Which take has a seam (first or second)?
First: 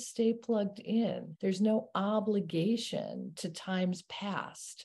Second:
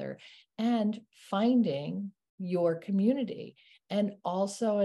first